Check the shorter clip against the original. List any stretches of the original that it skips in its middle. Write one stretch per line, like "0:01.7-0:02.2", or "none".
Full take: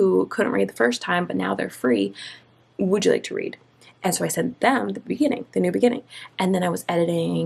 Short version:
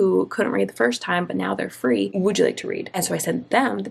0:02.1-0:02.8
0:03.6-0:04.0

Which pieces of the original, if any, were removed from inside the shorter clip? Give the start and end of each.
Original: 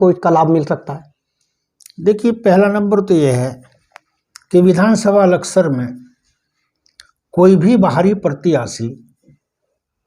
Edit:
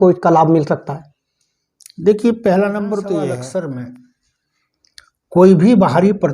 0:03.4-0:05.4

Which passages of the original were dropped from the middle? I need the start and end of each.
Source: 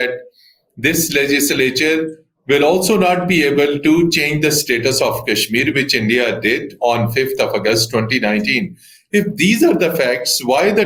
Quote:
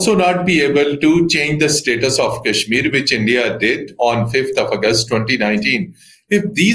none

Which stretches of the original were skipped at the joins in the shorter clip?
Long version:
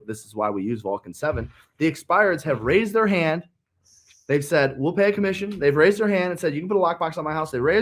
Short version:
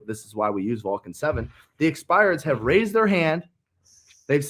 none

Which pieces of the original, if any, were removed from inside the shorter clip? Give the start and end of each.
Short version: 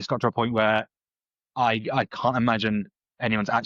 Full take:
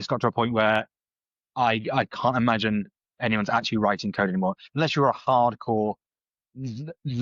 none

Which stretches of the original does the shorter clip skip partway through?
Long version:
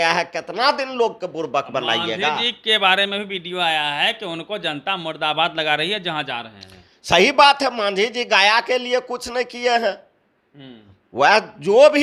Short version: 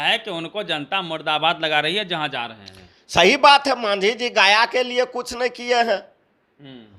none

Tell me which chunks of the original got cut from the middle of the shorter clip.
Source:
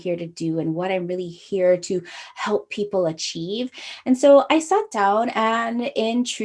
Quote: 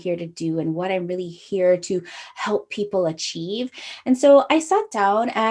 none

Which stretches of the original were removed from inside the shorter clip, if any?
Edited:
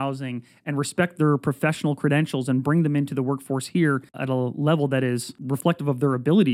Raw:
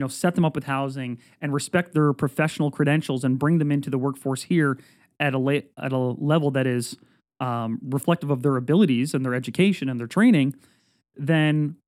0:04.9-0:05.8
0:07.0-0:07.8

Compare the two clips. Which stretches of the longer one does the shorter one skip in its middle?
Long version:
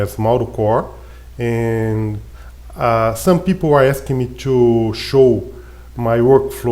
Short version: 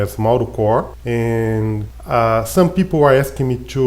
0:01.0-0:01.3
0:02.2-0:02.6

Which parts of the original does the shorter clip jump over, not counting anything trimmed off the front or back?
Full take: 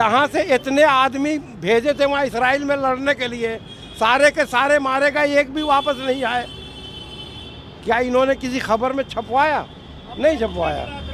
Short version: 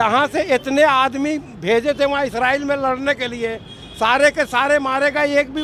none

